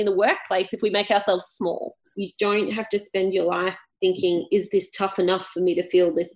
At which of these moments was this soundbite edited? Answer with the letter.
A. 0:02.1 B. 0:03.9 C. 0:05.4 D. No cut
A